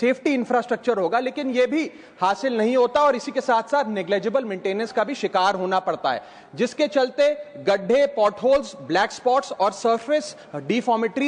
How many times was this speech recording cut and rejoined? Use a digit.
0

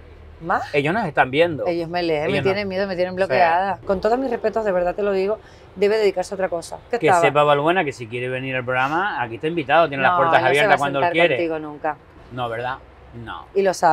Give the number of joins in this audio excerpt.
2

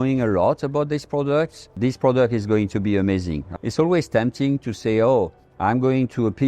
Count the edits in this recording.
3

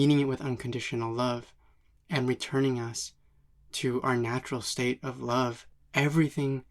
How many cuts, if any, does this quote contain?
1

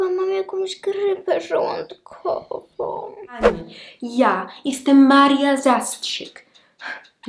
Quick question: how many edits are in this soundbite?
1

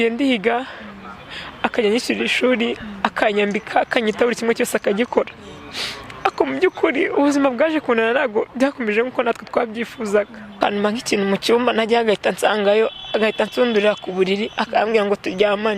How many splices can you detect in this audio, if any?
1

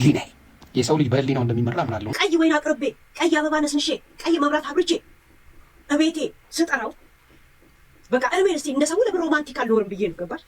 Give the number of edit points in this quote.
1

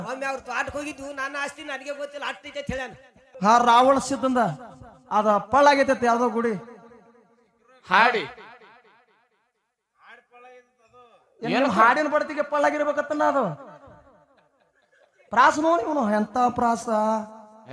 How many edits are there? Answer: 1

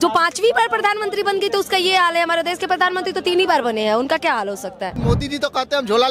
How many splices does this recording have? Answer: 1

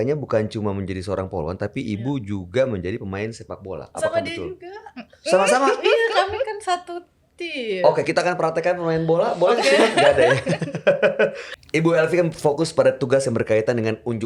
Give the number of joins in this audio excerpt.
1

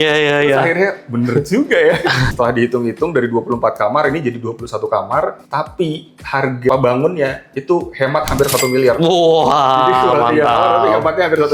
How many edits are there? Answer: 2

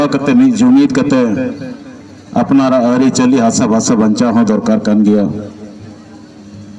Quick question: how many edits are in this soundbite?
0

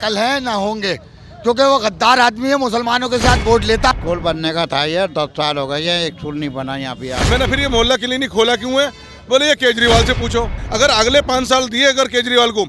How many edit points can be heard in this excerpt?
3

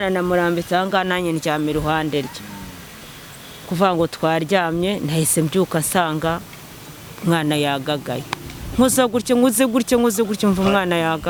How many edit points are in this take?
0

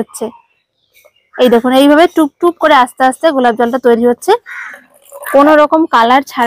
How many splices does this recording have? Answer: 1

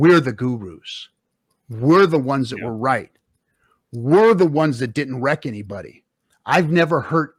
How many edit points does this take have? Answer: 0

